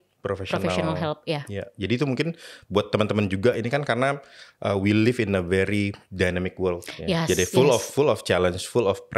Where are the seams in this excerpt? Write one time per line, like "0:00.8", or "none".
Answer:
none